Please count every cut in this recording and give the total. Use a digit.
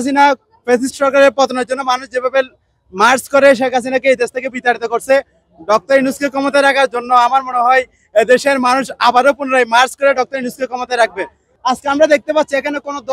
1